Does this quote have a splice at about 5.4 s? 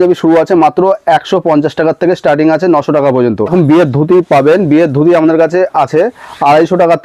no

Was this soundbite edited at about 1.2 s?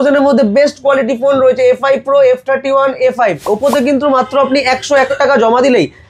no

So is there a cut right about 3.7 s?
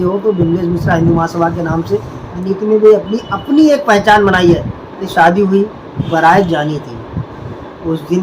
no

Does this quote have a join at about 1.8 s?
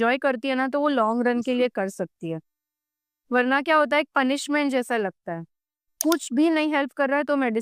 no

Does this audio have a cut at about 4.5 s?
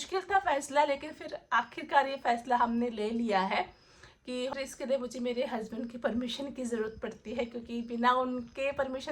yes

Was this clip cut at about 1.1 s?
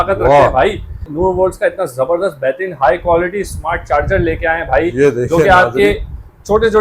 yes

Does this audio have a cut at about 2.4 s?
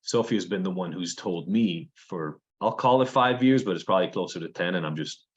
yes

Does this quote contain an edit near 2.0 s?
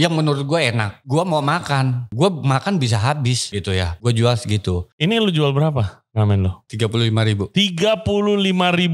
yes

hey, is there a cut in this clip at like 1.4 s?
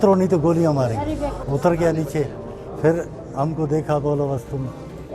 yes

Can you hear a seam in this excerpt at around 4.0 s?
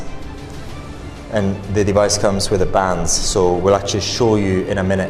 no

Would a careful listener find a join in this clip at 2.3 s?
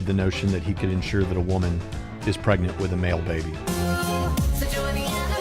no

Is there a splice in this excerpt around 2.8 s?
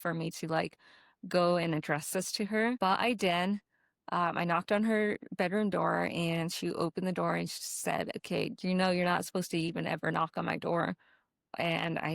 yes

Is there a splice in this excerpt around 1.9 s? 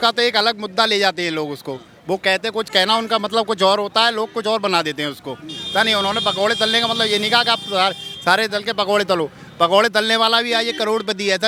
no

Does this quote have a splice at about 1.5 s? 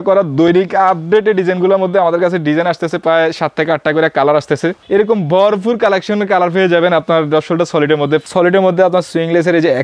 no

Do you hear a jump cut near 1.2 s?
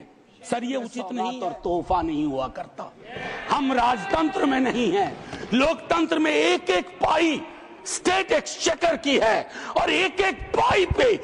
yes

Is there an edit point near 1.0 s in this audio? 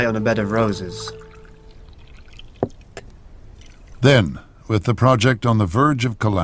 no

